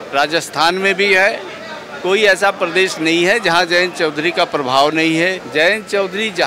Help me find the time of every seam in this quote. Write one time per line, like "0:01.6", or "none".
0:05.4